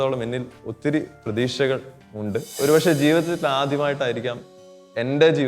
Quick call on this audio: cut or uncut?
cut